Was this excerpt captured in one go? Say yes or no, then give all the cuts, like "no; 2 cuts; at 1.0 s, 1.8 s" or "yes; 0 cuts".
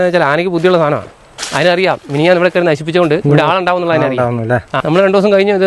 no; 2 cuts; at 3.2 s, 4.8 s